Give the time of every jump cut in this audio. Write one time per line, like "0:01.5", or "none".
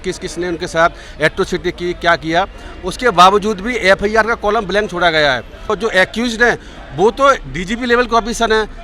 0:05.7